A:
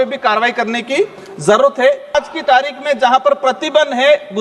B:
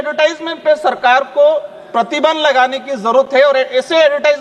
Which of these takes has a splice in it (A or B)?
A